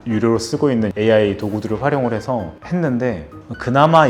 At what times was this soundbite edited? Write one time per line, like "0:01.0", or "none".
0:00.9